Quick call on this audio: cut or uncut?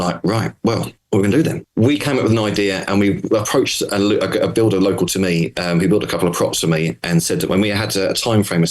cut